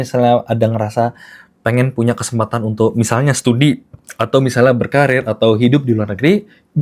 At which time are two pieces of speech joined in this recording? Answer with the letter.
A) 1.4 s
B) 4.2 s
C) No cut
C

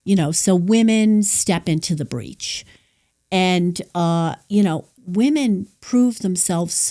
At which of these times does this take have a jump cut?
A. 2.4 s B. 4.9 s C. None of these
B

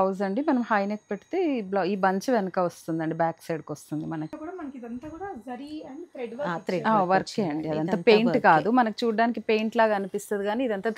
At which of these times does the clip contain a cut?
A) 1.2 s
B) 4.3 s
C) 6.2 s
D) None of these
B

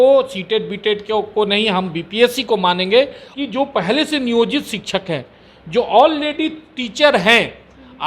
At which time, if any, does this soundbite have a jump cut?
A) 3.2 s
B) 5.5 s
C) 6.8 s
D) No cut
A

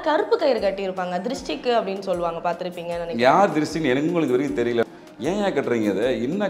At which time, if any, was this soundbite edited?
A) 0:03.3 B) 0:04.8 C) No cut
B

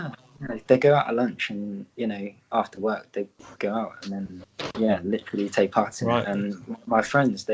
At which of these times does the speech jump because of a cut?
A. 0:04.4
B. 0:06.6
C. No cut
A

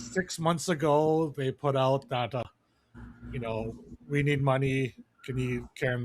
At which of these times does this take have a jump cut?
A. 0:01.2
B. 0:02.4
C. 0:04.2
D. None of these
B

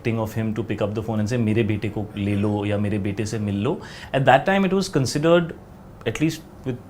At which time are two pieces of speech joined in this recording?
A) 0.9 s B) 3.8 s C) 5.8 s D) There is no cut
D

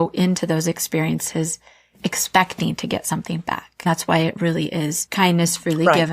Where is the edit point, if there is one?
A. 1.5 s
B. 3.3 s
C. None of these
C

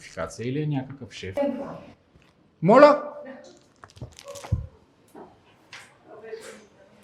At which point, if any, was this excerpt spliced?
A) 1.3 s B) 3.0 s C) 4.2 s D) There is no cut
A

